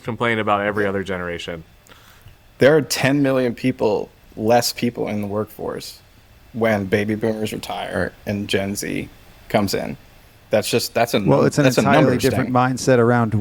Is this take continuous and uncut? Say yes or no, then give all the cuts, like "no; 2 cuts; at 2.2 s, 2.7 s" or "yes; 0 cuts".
yes; 0 cuts